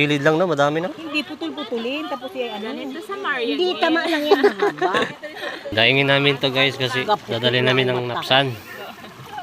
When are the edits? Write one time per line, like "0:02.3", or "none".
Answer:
0:05.6